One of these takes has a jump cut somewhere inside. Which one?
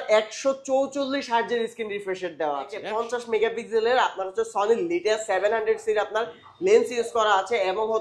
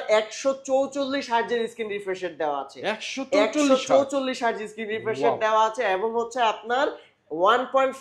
first; 1 cut; at 2.8 s

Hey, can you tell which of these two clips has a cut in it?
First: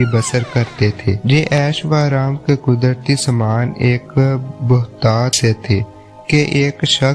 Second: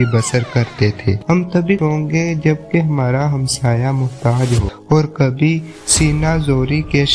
second; 2 cuts; at 1.2 s, 4.7 s

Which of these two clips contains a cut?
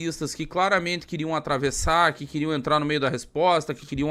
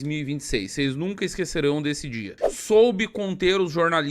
second; 1 cut; at 2.3 s

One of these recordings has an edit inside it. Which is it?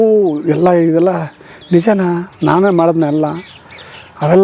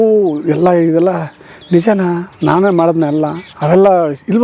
second; 1 cut; at 3.5 s

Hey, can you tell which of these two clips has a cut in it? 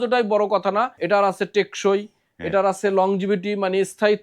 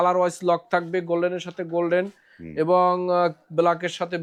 first; 1 cut; at 1.0 s

